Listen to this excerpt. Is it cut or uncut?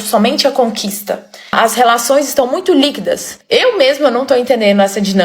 cut